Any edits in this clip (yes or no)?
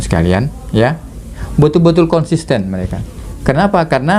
yes